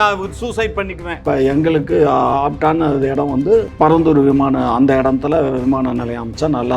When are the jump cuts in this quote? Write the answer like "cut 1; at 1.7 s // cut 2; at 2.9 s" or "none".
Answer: cut 1; at 1.2 s // cut 2; at 3.7 s